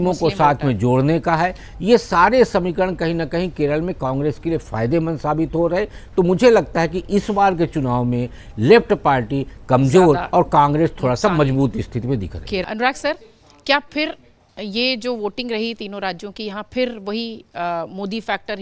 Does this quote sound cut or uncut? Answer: uncut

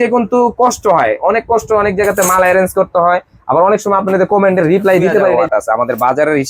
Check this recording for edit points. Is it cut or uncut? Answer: cut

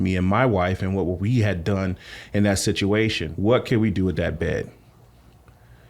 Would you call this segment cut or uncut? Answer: cut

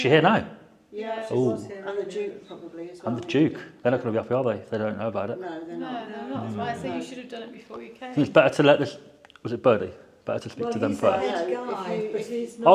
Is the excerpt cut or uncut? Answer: uncut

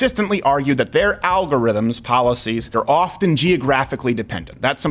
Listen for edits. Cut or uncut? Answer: cut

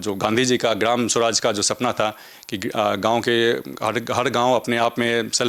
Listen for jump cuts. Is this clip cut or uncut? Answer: uncut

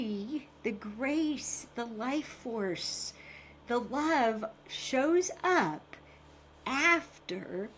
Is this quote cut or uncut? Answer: uncut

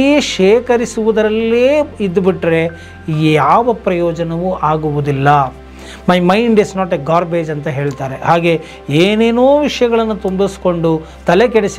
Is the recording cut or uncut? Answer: uncut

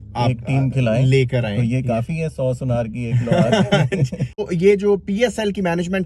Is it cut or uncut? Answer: cut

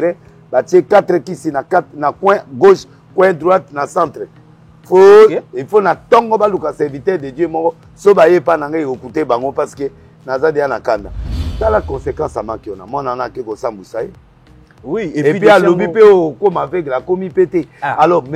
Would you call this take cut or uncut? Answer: cut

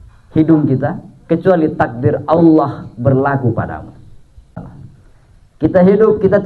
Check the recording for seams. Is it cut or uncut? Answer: cut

